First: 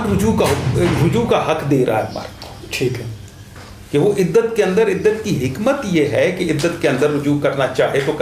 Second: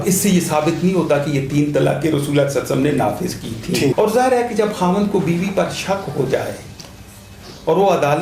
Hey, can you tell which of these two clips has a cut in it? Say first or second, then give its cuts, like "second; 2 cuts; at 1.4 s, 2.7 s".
second; 1 cut; at 3.9 s